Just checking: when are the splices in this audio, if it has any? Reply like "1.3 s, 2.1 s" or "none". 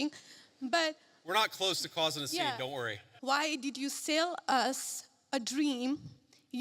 3.1 s